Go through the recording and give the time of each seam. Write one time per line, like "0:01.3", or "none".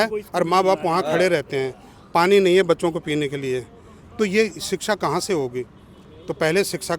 none

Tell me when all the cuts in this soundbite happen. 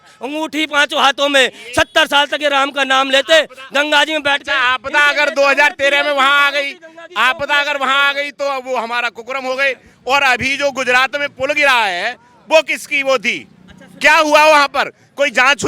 none

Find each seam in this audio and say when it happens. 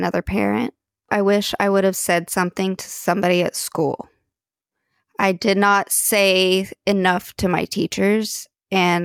0:01.1

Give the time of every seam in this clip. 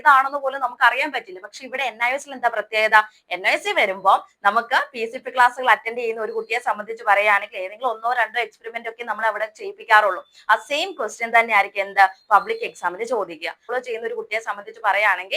0:13.7

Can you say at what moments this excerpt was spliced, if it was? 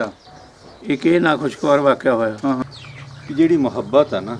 0:02.6

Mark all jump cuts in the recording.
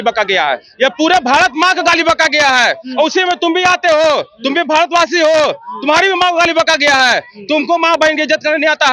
none

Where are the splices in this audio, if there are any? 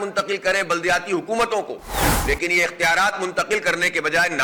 none

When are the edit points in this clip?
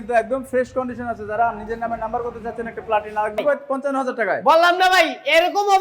0:03.4

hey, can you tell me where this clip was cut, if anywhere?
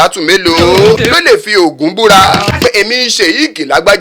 0:01.0
0:02.5

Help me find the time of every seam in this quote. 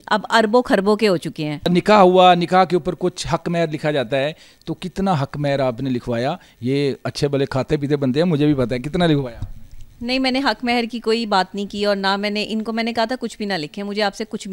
none

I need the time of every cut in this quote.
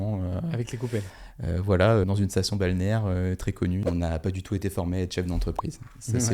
0:02.0
0:03.8

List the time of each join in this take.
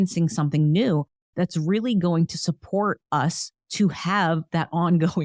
none

